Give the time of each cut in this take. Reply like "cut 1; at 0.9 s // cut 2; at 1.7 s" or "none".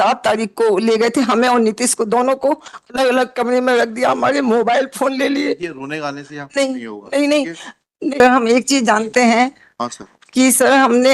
cut 1; at 8.2 s